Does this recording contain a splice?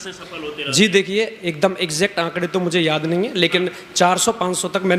no; 0 cuts

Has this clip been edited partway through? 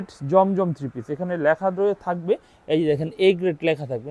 no; 0 cuts

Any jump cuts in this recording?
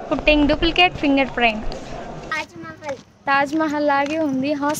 yes; 1 cut; at 2.3 s

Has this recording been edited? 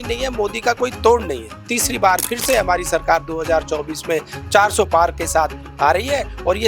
yes; 1 cut; at 1.8 s

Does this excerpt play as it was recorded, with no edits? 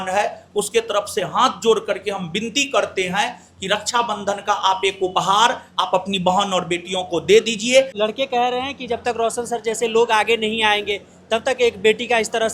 no; 1 cut; at 7.9 s

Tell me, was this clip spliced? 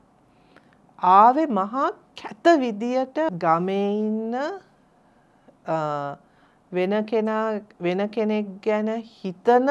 yes; 1 cut; at 3.3 s

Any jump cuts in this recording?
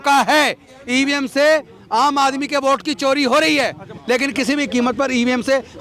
yes; 1 cut; at 3.9 s

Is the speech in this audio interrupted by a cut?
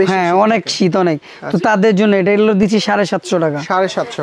no; 0 cuts

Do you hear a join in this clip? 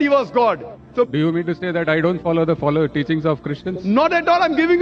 yes; 1 cut; at 1.1 s

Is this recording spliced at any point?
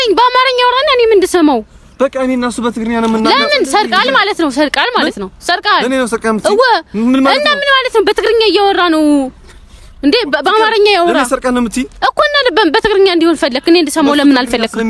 no; 0 cuts

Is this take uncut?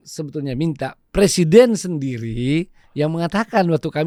yes; 0 cuts

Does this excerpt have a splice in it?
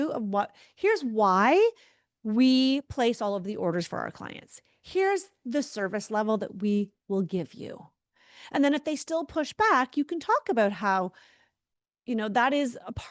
no; 0 cuts

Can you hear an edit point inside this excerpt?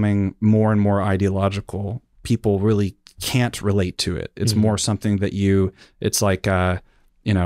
no; 0 cuts

